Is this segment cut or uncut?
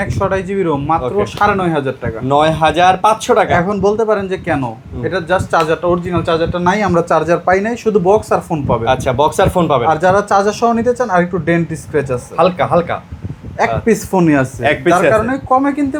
uncut